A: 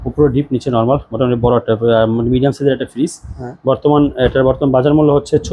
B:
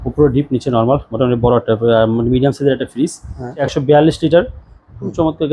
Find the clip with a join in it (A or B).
B